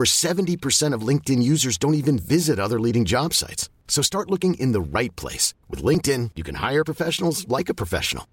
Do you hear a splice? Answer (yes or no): no